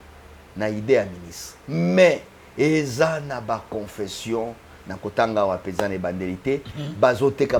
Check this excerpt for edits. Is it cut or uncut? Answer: uncut